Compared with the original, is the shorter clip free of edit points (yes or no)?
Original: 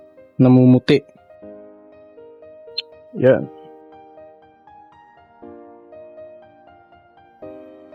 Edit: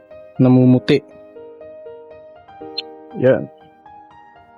no